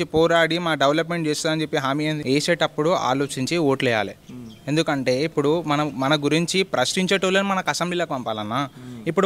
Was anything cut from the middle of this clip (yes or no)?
yes